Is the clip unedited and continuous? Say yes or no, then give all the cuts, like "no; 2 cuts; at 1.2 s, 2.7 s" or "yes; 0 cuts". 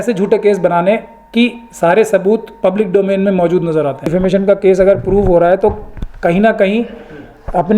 no; 1 cut; at 4.1 s